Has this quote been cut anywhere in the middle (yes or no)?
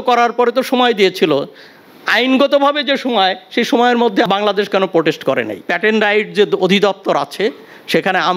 yes